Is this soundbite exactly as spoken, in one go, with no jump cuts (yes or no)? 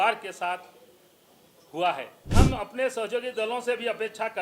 no